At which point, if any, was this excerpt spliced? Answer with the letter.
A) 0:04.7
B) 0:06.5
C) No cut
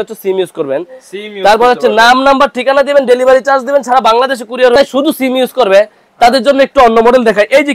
A